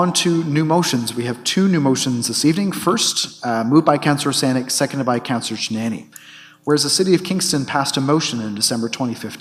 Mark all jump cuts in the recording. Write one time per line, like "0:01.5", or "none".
none

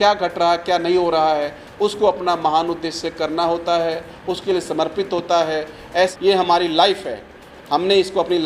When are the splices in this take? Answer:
0:06.1

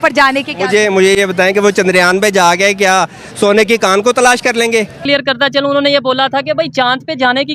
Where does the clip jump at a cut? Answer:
0:05.0

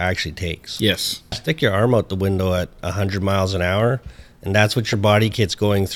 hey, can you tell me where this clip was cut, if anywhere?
0:01.4

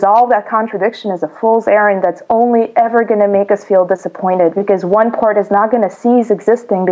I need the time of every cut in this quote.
none

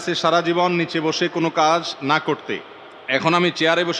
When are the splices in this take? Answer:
none

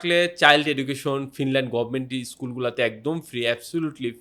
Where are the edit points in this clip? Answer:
none

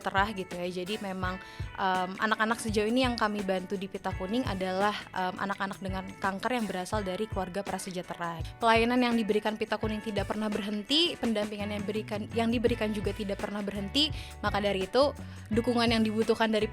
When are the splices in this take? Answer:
0:08.4

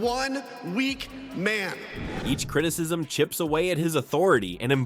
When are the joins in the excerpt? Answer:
none

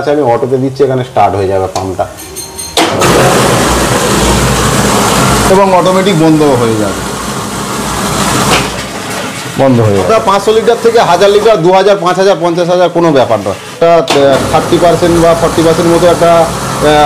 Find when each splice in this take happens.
0:10.1
0:13.8

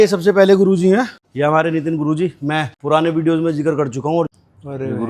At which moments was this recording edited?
0:01.2
0:02.7
0:04.3

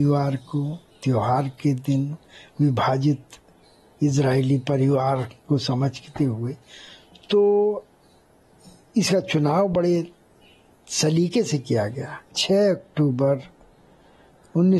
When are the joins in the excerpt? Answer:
0:12.4

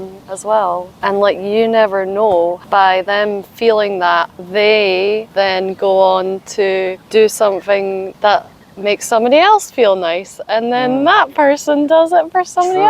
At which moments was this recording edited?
0:00.9
0:02.6
0:04.4
0:05.3
0:07.0
0:08.1

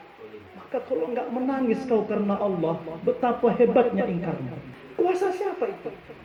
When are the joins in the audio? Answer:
none

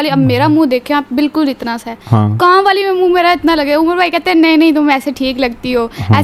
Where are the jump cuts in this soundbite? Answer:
none

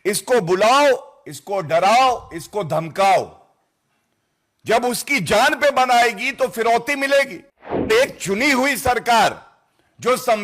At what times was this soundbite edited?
0:07.9

